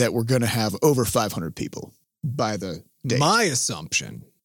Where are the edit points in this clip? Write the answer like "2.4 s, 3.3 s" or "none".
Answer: 2.1 s